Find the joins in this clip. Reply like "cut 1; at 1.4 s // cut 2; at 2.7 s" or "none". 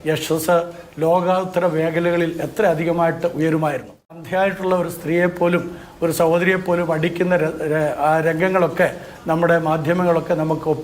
cut 1; at 4.2 s